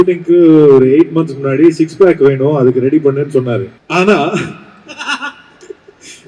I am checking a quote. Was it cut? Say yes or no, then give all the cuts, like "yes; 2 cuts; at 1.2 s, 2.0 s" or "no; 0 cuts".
yes; 1 cut; at 3.8 s